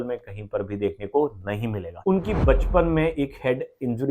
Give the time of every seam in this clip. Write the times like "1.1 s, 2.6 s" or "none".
1.9 s